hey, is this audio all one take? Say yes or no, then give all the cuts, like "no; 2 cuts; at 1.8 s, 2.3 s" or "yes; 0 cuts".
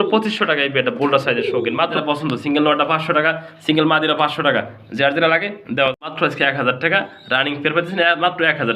no; 2 cuts; at 2.0 s, 6.1 s